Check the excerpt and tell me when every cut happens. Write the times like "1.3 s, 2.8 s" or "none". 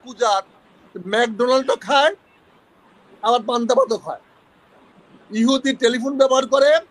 none